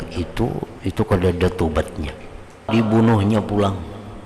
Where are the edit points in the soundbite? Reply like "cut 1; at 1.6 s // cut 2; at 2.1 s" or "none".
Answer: cut 1; at 2.6 s